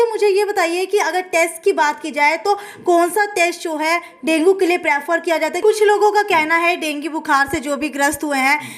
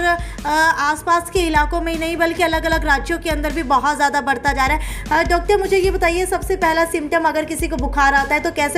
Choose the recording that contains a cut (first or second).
first